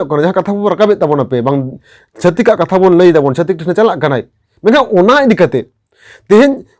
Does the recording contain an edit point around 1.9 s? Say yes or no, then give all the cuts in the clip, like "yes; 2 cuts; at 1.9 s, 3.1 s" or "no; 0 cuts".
no; 0 cuts